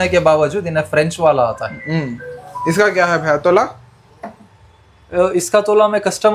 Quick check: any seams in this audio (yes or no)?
no